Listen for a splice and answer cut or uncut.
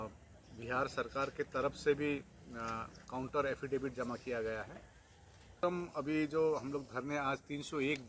cut